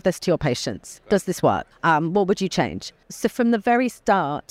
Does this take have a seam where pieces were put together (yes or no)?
yes